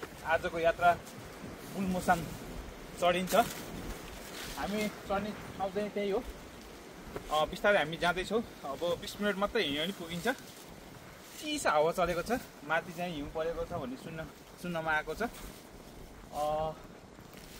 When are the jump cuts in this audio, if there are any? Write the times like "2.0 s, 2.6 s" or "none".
none